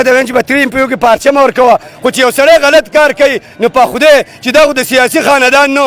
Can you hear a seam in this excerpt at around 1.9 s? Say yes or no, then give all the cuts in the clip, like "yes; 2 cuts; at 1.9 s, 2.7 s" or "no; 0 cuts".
yes; 1 cut; at 1.9 s